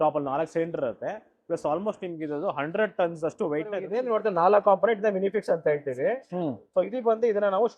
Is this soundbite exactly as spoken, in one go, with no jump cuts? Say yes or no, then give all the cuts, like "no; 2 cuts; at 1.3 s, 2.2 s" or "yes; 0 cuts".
no; 1 cut; at 3.9 s